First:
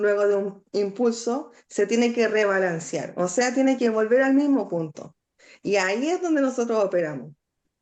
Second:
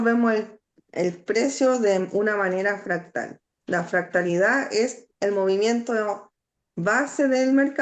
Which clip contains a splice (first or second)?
second